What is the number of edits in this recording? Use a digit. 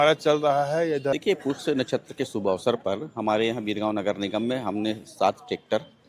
1